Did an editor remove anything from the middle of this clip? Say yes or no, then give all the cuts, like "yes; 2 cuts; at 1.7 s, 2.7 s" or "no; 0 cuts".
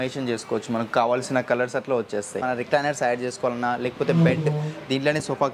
yes; 1 cut; at 2.4 s